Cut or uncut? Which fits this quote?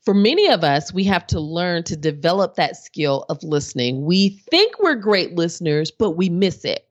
uncut